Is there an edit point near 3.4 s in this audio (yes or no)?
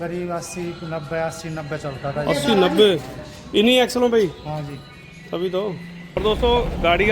no